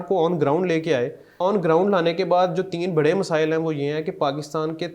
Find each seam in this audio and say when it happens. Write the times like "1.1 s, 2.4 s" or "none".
1.2 s